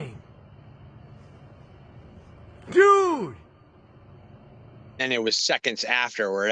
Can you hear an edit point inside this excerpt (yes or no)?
yes